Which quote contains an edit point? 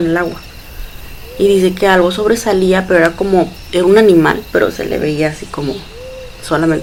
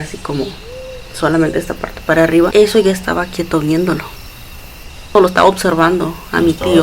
second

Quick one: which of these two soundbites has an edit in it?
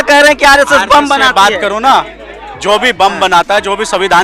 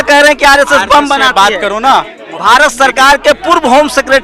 second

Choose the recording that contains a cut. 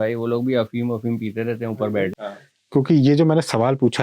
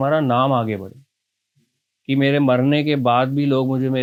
first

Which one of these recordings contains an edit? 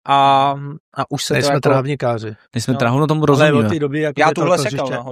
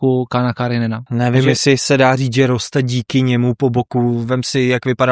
second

